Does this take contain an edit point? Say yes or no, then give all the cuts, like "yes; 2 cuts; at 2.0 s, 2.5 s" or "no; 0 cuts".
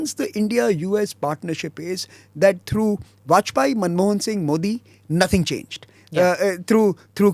no; 0 cuts